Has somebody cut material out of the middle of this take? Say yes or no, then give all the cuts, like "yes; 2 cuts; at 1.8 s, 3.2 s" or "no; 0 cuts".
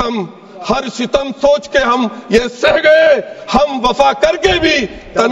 no; 0 cuts